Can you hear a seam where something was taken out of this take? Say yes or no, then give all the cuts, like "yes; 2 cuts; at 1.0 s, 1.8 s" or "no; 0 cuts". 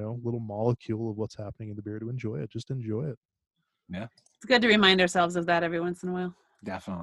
no; 0 cuts